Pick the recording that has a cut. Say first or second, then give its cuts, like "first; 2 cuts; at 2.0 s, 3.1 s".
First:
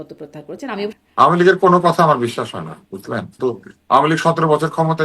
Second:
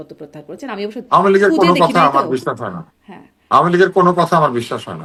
first; 2 cuts; at 1.0 s, 3.4 s